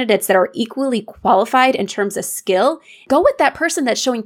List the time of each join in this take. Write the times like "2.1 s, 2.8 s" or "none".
3.0 s